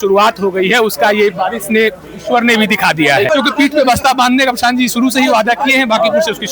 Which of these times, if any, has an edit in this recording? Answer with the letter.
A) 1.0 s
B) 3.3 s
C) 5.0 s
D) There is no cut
B